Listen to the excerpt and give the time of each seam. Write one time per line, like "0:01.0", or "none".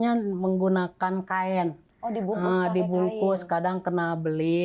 none